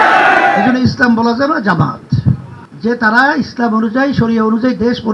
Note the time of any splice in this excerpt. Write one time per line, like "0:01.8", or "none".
0:02.6